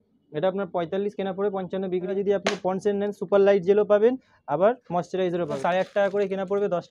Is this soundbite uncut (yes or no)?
no